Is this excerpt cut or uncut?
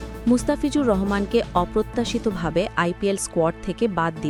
uncut